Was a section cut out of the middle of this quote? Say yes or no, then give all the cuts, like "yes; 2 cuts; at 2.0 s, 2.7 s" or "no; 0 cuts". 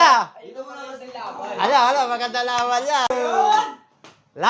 yes; 1 cut; at 3.1 s